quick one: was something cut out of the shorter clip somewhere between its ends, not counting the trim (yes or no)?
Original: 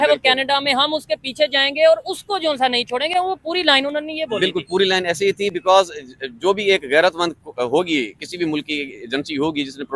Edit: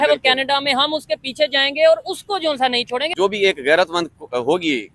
yes